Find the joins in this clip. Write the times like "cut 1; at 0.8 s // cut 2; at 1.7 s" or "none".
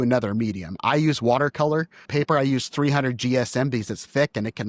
cut 1; at 2.1 s